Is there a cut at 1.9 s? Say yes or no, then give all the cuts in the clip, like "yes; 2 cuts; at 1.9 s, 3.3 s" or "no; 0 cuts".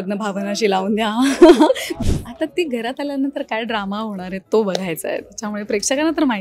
yes; 1 cut; at 1.9 s